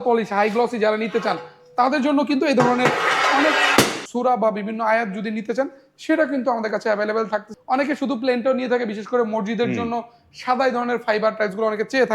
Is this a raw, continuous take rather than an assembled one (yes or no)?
no